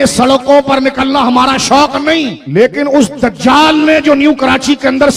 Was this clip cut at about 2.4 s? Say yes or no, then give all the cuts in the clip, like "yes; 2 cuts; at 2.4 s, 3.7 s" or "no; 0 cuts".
yes; 1 cut; at 2.4 s